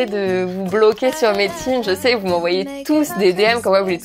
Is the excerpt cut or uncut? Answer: uncut